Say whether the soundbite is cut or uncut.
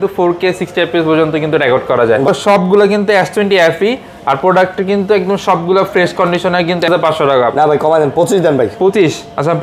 cut